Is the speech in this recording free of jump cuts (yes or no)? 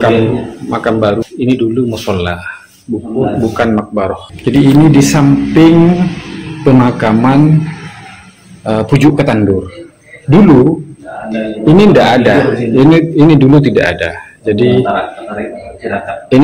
no